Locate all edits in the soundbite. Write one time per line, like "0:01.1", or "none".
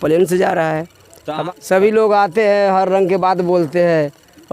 0:01.3